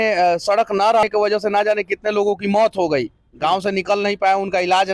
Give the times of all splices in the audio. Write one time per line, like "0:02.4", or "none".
0:01.0